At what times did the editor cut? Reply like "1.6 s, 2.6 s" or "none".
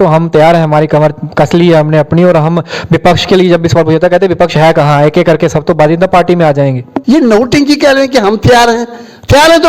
6.9 s

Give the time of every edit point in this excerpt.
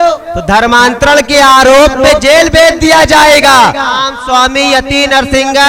4.1 s

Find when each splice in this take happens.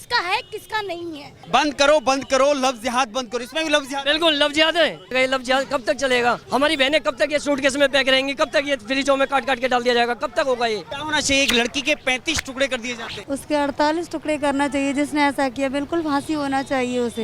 1.4 s, 5.1 s, 6.4 s, 10.9 s, 13.1 s

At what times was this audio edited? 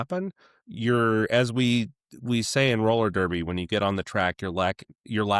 none

